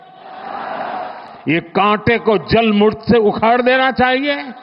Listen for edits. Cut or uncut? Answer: cut